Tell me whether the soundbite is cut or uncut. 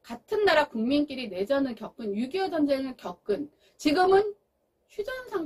uncut